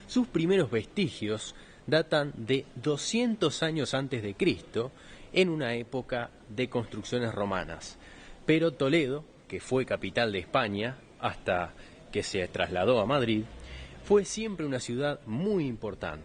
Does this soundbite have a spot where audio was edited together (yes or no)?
no